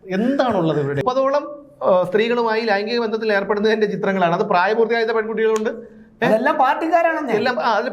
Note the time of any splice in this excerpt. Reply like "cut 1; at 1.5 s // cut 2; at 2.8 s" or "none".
cut 1; at 1.0 s

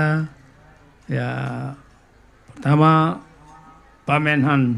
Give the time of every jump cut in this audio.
none

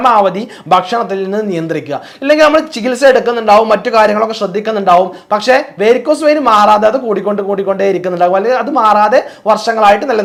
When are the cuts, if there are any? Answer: none

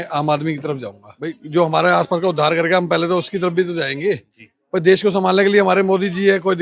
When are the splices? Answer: cut 1; at 1.4 s

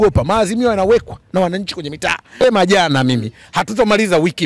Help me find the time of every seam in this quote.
cut 1; at 2.4 s

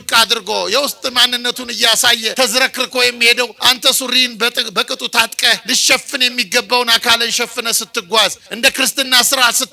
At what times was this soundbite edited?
cut 1; at 2.3 s // cut 2; at 3.6 s // cut 3; at 5.6 s // cut 4; at 8.4 s

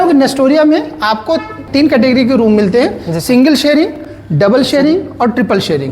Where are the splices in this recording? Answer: cut 1; at 1.6 s

